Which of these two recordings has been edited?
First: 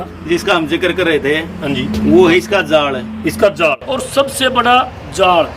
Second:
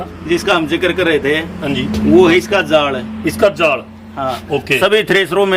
first; 1 cut; at 3.8 s

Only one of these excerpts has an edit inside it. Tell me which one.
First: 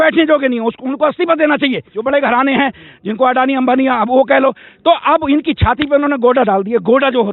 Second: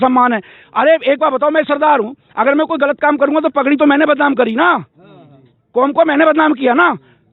first; 1 cut; at 1.9 s

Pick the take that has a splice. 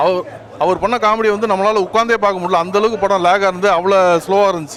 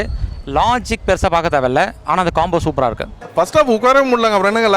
second; 1 cut; at 3.1 s

